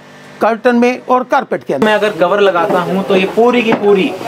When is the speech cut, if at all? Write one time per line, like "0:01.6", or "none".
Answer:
0:01.8